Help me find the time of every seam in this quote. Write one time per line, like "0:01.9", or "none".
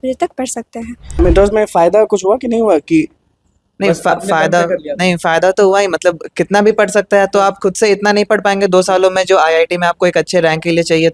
0:01.2